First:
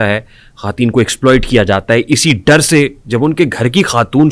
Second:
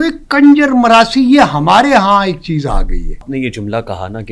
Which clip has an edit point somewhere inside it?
second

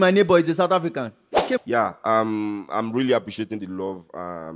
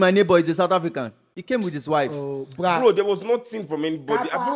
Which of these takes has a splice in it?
first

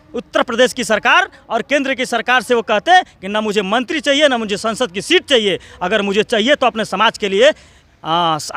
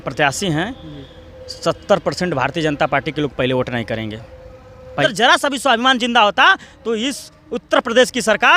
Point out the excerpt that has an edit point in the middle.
second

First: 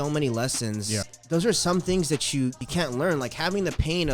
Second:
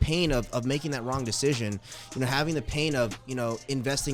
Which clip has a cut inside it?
first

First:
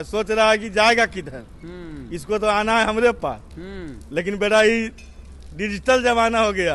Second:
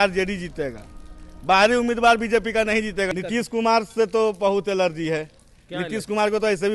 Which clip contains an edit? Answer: second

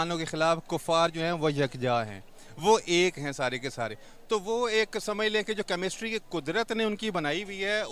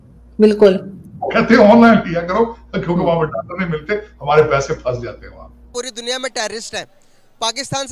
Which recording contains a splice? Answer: second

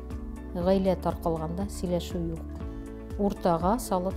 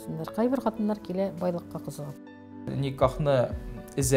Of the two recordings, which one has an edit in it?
second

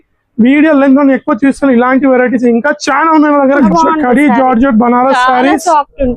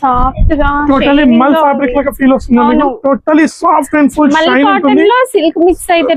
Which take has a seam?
first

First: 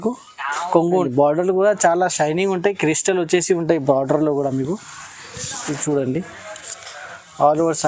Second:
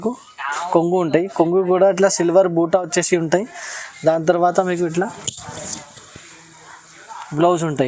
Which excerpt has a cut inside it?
first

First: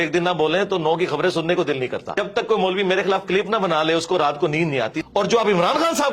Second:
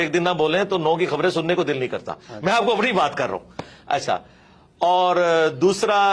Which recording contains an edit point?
first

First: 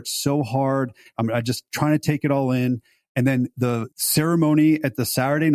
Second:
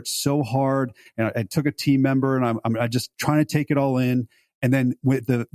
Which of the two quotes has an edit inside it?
first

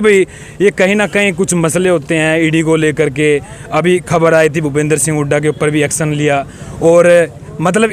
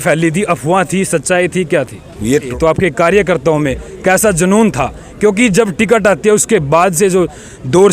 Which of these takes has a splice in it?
second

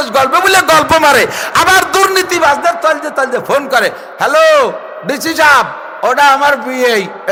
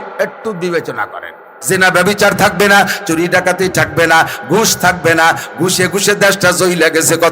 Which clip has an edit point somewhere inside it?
second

